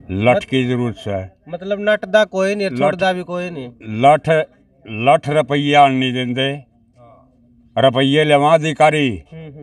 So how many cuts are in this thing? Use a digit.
0